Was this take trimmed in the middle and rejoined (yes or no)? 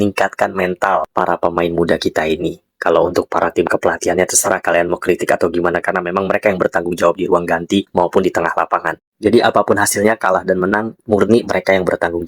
no